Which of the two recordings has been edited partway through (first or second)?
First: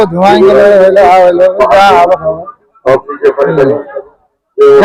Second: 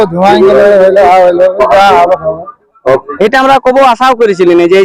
second